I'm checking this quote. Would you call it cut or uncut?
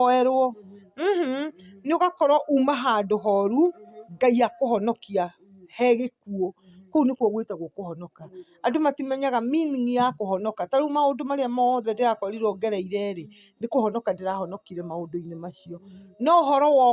uncut